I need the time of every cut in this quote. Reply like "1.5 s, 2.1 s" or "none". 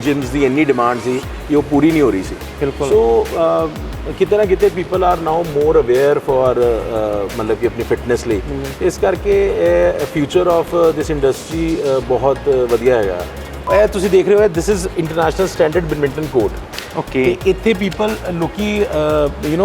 13.7 s